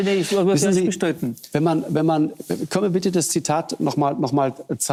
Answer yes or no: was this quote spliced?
no